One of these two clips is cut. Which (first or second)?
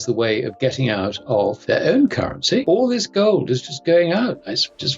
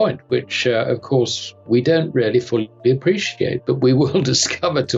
first